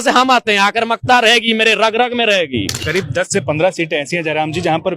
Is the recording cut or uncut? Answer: cut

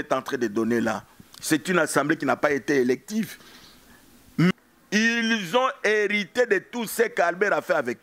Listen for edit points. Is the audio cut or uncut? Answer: cut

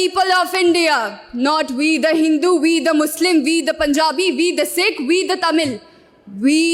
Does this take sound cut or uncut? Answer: uncut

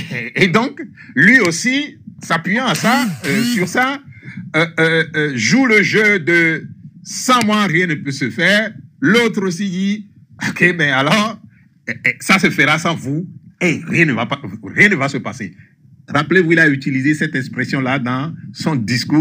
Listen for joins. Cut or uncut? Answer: uncut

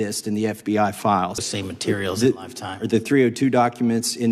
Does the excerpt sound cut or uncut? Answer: cut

